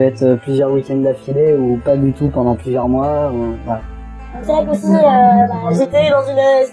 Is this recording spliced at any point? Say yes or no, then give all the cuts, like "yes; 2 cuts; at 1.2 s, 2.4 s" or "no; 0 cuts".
no; 0 cuts